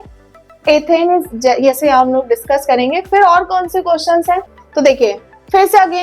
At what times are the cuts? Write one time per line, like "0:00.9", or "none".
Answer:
0:04.6